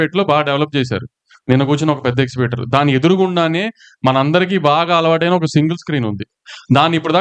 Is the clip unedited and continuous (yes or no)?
yes